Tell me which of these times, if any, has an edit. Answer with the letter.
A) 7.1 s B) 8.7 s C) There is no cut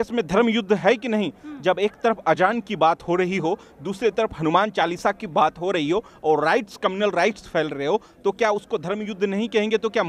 C